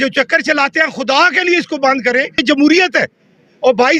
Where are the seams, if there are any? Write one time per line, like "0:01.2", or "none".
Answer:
0:02.4